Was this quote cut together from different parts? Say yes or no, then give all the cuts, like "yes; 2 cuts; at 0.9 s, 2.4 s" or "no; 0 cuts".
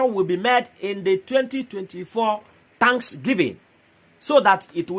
yes; 1 cut; at 2.6 s